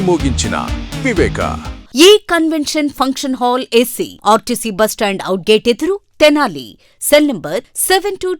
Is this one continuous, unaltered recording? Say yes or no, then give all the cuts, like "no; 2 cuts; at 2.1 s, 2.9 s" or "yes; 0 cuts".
no; 1 cut; at 1.8 s